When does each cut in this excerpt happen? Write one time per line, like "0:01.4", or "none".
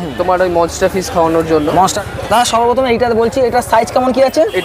0:02.0